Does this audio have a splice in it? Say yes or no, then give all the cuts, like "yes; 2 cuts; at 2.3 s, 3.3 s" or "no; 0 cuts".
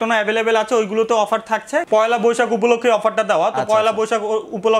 yes; 1 cut; at 1.9 s